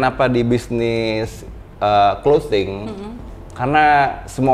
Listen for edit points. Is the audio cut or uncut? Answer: uncut